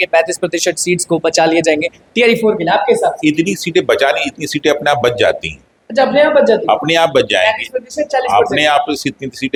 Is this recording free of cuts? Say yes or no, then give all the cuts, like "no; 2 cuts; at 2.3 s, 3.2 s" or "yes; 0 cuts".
yes; 0 cuts